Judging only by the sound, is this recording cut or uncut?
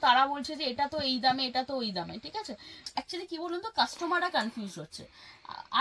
cut